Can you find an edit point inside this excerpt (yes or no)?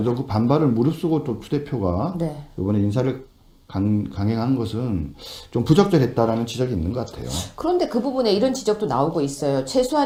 no